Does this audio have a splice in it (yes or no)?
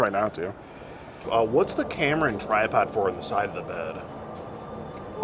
yes